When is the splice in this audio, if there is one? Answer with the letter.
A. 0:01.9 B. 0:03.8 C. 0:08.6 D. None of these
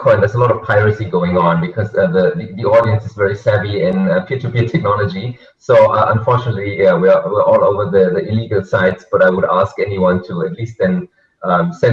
B